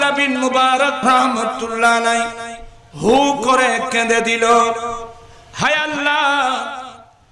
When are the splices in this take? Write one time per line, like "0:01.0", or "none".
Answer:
0:01.0